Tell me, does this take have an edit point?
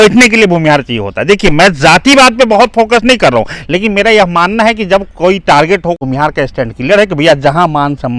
yes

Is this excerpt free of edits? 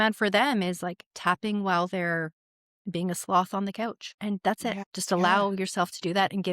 no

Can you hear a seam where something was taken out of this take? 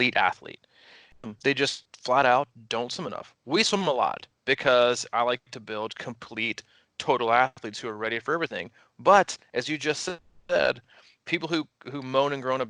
yes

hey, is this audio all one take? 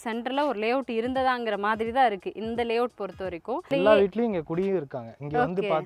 no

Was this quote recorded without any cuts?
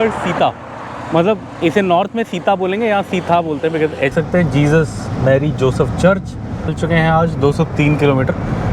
no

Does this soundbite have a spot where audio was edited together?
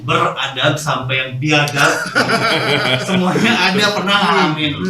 no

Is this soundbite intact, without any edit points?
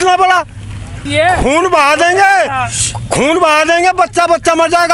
no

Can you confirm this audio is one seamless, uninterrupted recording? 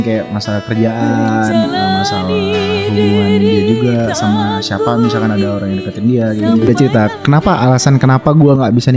yes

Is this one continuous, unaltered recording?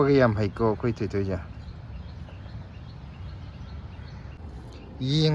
no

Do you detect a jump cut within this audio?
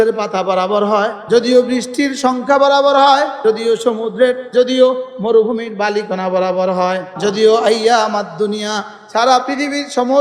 yes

